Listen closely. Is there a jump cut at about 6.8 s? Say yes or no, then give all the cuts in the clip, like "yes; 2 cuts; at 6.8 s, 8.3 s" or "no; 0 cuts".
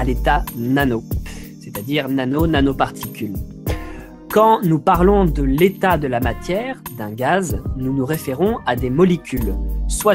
no; 1 cut; at 4.2 s